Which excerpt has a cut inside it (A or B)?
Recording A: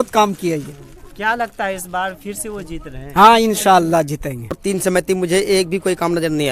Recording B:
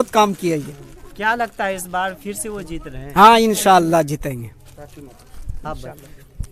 A